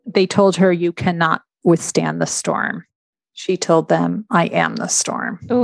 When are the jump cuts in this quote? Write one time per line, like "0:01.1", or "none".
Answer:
0:03.0